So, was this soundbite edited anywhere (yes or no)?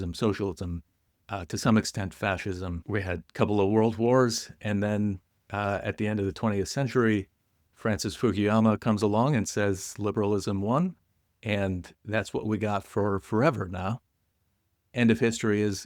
yes